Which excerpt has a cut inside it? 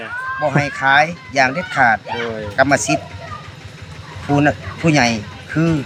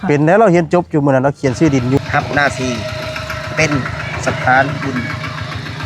second; 1 cut; at 2.0 s

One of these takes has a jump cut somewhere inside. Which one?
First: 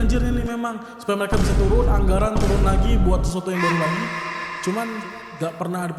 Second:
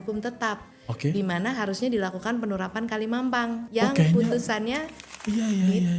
second; 1 cut; at 3.7 s

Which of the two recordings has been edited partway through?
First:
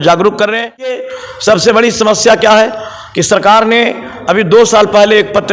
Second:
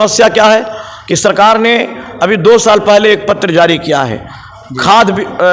first; 1 cut; at 1.0 s

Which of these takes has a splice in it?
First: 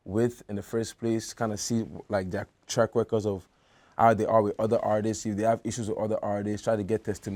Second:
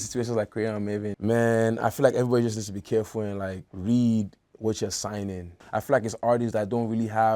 second; 3 cuts; at 1.1 s, 3.6 s, 5.5 s

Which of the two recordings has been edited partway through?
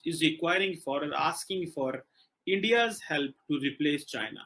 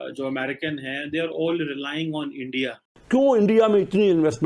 second; 1 cut; at 2.9 s

